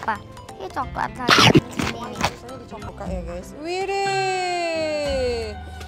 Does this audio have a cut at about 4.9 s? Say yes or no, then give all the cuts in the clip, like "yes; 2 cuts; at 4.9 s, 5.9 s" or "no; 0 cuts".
no; 1 cut; at 2.9 s